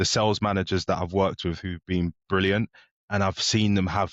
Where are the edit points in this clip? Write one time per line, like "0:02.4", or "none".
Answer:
none